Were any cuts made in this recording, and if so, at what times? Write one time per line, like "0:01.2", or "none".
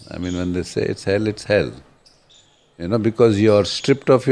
none